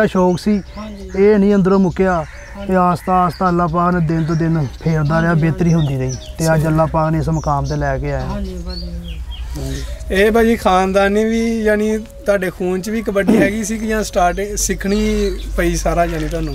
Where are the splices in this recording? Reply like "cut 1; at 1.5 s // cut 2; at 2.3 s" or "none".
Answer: none